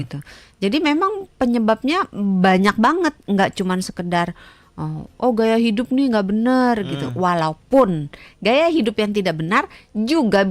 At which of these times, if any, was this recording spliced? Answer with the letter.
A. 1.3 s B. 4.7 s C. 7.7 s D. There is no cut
D